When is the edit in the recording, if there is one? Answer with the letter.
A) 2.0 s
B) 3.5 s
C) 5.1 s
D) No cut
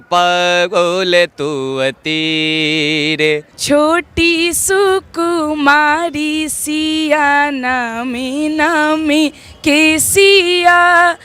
B